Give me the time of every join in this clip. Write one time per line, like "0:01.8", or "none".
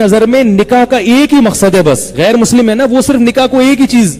0:02.1